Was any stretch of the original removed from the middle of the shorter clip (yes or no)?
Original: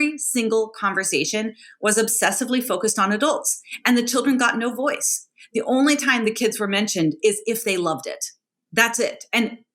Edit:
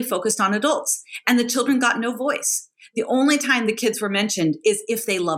no